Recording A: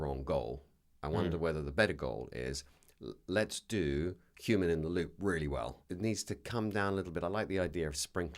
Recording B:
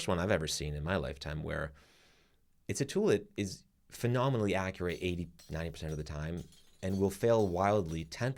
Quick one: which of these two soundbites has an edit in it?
A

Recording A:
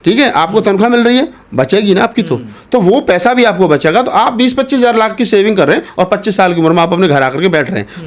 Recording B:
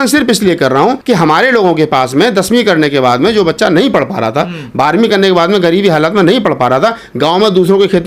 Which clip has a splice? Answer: B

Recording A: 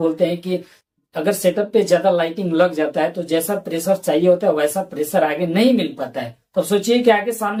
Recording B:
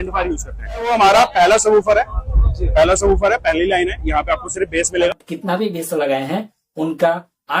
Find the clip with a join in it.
B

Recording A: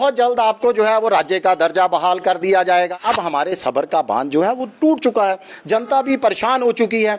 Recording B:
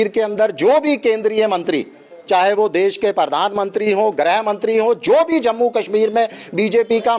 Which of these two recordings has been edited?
A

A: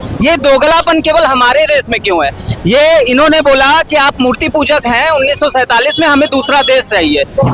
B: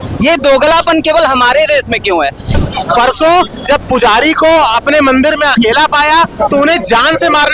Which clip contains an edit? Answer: B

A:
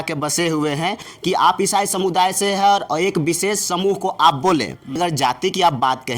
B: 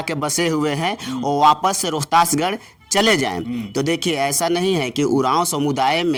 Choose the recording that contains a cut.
A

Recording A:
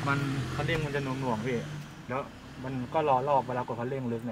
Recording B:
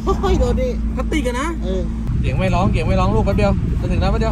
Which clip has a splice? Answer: B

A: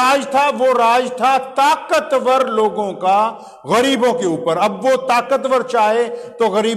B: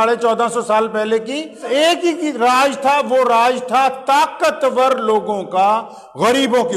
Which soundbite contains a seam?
B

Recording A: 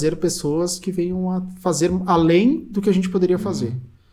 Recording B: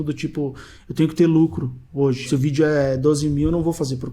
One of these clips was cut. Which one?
B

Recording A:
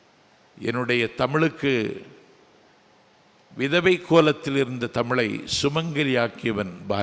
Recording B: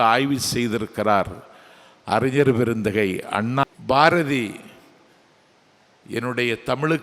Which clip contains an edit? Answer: B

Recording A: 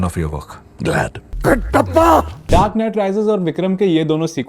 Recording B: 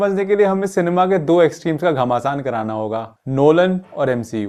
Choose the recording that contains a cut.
A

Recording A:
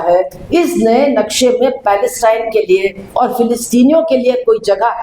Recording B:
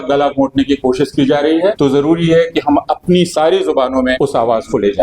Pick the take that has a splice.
B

